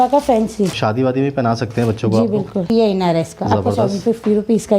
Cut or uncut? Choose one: cut